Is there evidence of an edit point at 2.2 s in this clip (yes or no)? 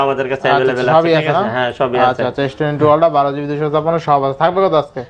no